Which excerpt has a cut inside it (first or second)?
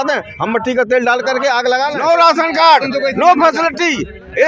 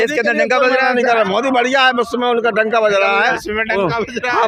first